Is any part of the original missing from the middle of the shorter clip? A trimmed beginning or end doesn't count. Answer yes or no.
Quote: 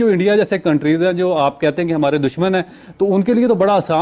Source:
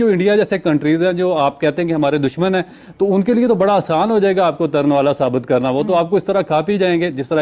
no